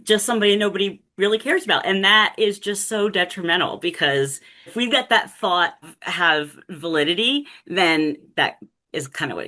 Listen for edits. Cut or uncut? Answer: cut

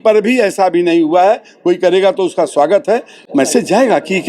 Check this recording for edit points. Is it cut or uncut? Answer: cut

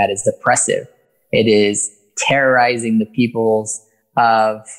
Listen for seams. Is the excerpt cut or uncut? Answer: uncut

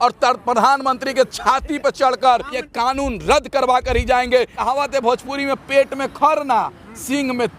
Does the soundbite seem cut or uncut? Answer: cut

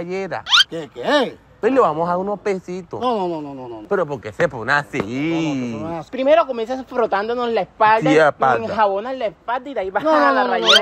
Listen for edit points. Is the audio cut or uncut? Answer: uncut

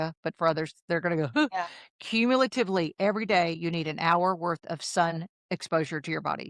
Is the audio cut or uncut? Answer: cut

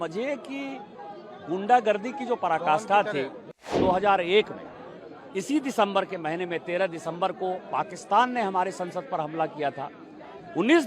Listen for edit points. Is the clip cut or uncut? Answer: cut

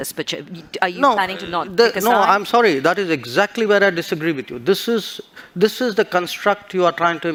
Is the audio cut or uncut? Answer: uncut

